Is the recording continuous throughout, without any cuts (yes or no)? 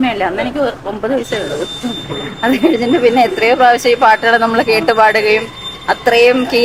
yes